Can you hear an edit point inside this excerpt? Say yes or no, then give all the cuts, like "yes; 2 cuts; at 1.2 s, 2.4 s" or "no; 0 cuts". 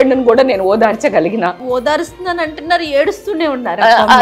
yes; 1 cut; at 1.6 s